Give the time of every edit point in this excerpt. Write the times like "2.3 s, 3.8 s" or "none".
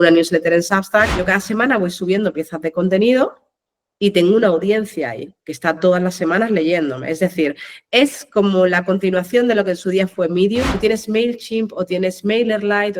1.2 s, 10.7 s